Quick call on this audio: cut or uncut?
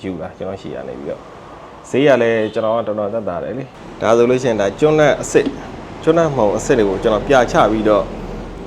cut